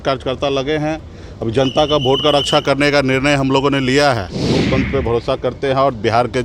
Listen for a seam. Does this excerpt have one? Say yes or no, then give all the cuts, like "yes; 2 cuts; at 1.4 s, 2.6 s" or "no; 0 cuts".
yes; 1 cut; at 4.5 s